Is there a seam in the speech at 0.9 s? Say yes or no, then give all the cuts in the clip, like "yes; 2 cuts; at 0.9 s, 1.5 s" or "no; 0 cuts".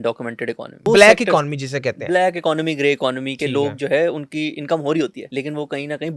yes; 2 cuts; at 0.9 s, 5.2 s